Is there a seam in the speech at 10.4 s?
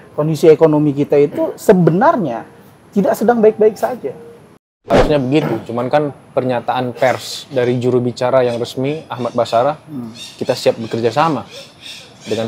no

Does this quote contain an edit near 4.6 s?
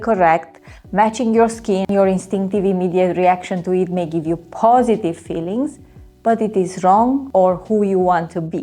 no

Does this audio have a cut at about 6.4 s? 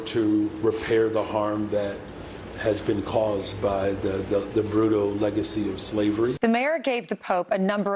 yes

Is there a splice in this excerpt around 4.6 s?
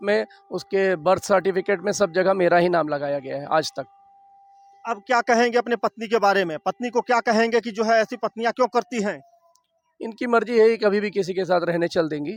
no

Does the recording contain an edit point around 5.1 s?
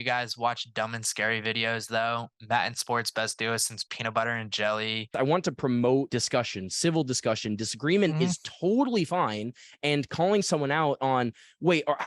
yes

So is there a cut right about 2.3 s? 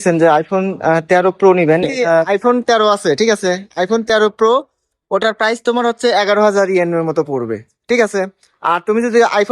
yes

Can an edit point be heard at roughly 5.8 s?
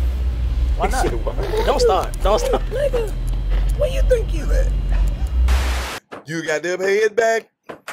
yes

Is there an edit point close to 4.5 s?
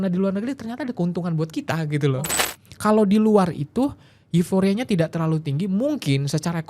no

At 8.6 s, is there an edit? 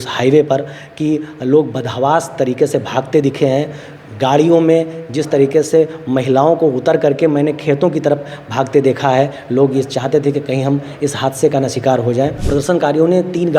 no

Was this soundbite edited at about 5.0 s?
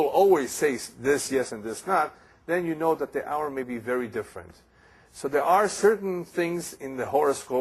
no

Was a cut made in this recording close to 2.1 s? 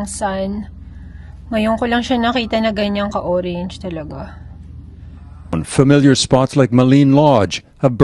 no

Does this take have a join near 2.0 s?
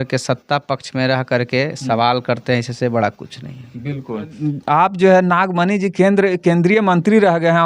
no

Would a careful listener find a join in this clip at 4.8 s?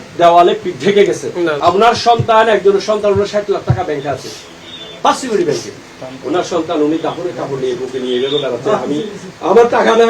no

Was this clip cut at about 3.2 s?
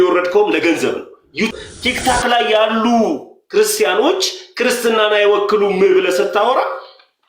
no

